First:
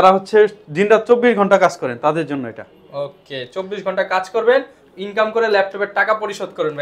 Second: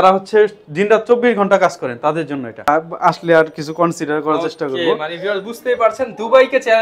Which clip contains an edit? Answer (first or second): second